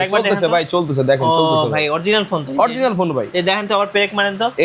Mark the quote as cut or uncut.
uncut